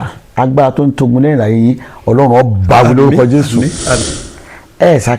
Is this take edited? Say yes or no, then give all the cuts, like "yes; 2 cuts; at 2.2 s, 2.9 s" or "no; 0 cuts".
yes; 1 cut; at 4.0 s